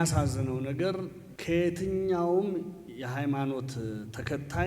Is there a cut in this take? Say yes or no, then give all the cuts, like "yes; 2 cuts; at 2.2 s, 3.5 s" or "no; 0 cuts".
yes; 1 cut; at 1.3 s